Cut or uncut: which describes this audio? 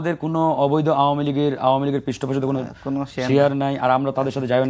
uncut